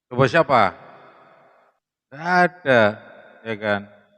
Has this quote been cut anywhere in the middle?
yes; 1 cut; at 1.9 s

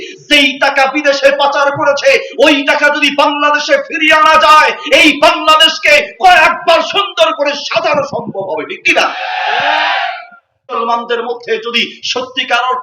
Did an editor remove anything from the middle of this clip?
yes; 1 cut; at 10.7 s

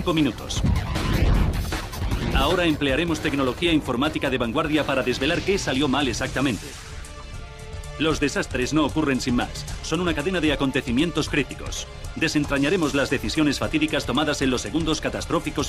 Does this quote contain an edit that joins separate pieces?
no; 0 cuts

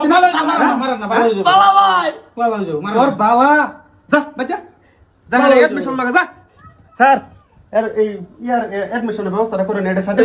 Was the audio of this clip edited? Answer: no; 0 cuts

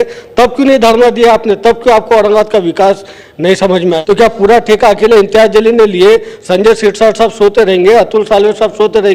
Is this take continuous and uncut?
no; 1 cut; at 4.0 s

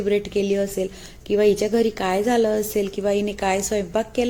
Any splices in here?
no; 0 cuts

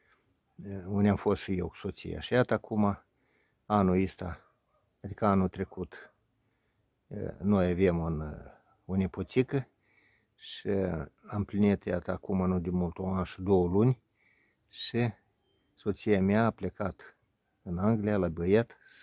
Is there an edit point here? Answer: no; 0 cuts

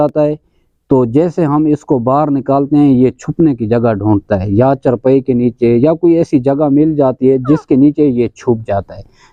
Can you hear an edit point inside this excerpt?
no; 0 cuts

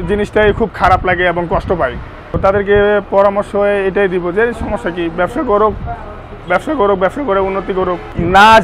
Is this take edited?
no; 0 cuts

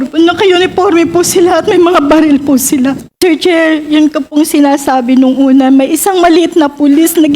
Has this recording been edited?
yes; 1 cut; at 3.1 s

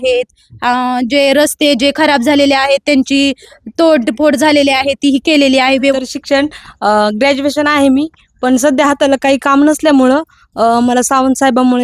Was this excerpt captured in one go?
no; 1 cut; at 5.9 s

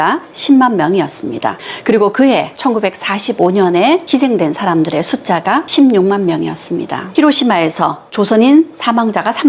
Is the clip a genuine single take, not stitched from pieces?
no; 1 cut; at 7.0 s

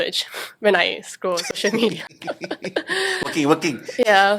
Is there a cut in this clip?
no; 0 cuts

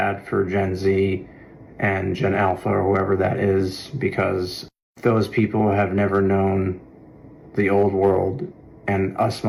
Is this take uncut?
yes; 0 cuts

